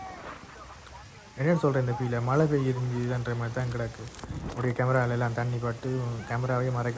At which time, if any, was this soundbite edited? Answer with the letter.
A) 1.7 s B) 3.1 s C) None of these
C